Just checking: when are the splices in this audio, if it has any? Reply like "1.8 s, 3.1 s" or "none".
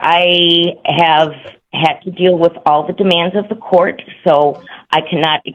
none